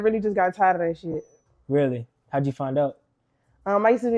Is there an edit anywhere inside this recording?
no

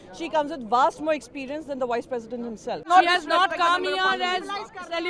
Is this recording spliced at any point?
yes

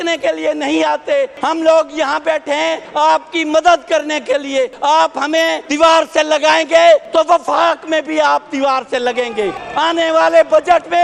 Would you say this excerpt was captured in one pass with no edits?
no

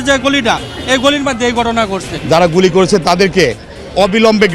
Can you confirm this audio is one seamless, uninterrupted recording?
no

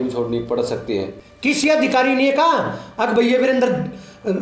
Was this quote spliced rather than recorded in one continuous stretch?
yes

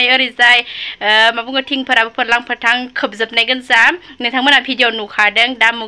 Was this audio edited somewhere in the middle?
no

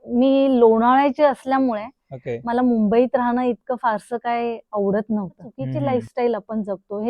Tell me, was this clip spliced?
yes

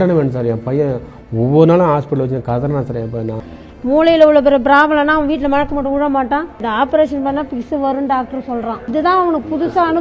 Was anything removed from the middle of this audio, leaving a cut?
yes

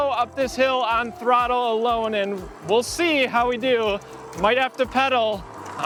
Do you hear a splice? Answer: no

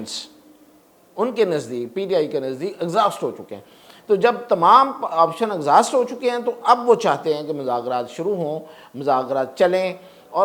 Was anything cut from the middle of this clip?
no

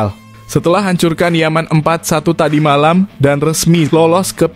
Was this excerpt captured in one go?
yes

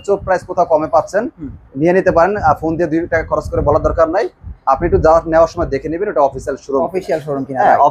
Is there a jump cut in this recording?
no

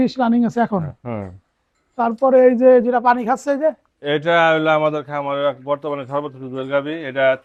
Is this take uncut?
yes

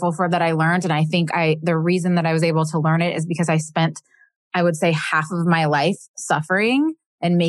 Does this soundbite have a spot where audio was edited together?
no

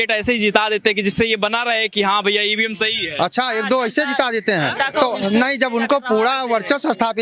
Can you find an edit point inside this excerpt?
no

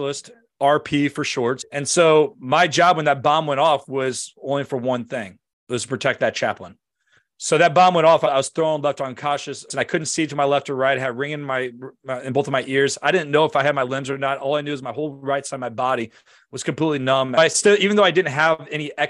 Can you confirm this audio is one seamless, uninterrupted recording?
no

